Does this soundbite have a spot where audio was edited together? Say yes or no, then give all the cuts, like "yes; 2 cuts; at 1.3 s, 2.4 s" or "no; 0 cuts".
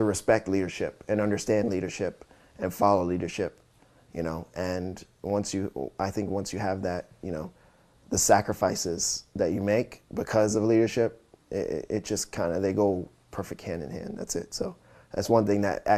no; 0 cuts